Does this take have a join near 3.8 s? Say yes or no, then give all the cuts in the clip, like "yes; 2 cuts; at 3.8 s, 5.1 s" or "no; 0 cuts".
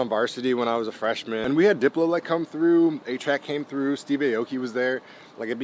no; 1 cut; at 1.4 s